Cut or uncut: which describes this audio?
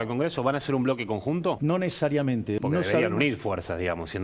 cut